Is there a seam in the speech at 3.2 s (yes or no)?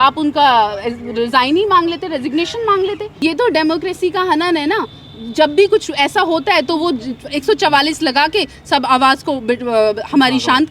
yes